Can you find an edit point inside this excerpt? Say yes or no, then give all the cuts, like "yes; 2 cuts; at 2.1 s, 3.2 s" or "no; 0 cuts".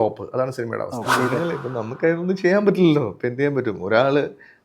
yes; 1 cut; at 1.0 s